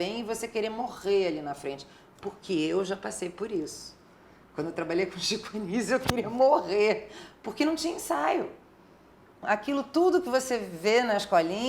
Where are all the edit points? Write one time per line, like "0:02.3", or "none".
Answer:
0:09.4